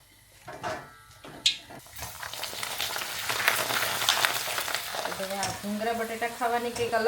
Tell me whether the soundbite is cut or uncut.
cut